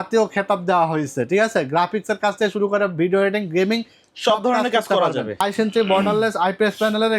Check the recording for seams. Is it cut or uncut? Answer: cut